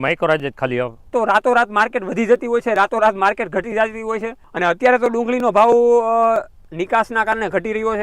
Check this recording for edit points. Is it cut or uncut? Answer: cut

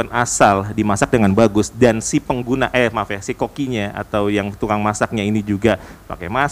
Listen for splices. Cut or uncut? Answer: uncut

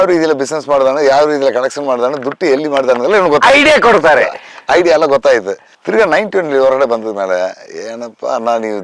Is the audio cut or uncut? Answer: uncut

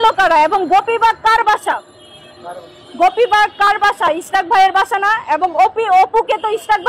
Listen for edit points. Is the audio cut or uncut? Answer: uncut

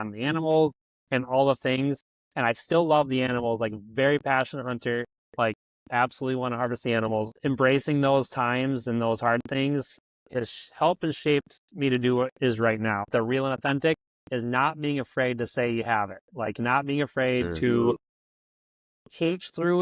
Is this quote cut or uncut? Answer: uncut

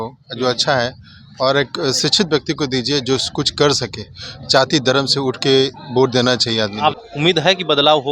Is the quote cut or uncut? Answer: cut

